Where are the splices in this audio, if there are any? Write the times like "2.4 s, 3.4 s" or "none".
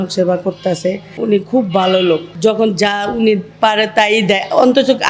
1.1 s, 2.3 s